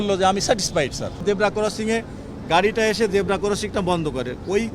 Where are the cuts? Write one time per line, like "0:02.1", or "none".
0:01.2